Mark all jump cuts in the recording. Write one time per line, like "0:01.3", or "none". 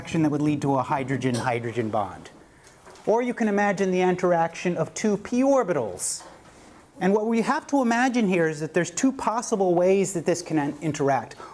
none